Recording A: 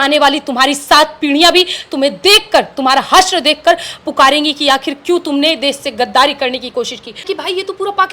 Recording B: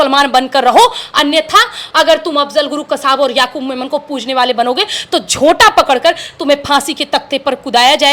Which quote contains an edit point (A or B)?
A